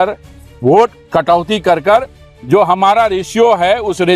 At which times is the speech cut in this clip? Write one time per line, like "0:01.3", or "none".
0:01.0